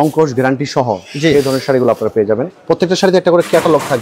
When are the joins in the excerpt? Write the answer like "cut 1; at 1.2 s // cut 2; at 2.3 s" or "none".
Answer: cut 1; at 2.5 s